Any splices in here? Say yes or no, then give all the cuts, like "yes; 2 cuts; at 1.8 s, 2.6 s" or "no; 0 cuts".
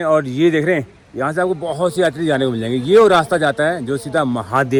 no; 0 cuts